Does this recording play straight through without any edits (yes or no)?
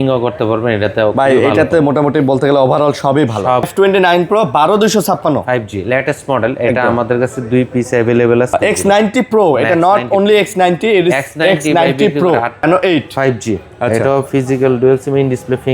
no